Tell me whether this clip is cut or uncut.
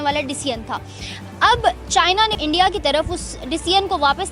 cut